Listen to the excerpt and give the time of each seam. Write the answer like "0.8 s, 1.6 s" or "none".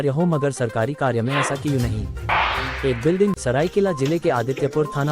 3.4 s